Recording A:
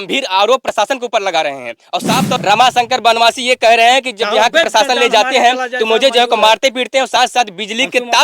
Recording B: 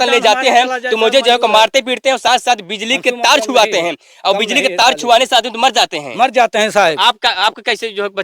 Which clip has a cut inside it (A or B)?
A